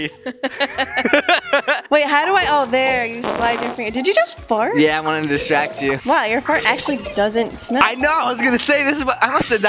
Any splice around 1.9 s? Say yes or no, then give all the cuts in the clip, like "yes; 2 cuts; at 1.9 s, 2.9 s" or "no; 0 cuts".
yes; 2 cuts; at 1.9 s, 6.0 s